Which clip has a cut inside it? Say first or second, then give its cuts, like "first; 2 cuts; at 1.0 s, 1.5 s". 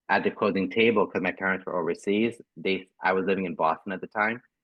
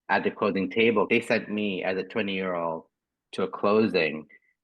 second; 1 cut; at 1.1 s